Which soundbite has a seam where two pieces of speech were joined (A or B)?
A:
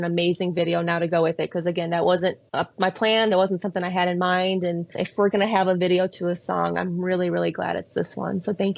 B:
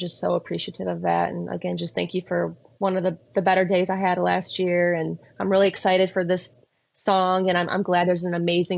A